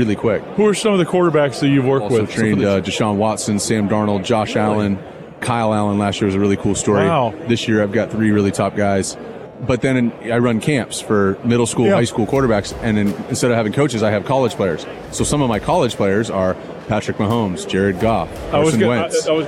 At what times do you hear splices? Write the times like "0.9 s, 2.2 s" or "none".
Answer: 2.3 s, 5.4 s, 9.4 s, 10.6 s